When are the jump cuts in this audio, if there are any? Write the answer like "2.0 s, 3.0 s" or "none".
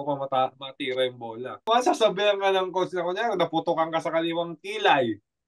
1.7 s